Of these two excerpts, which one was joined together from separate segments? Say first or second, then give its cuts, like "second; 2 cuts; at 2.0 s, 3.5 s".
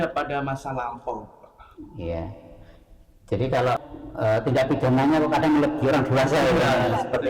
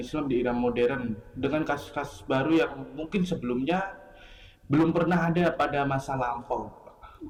first; 1 cut; at 3.9 s